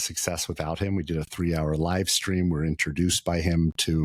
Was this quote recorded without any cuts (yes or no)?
yes